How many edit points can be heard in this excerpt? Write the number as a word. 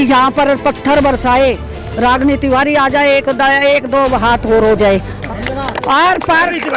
one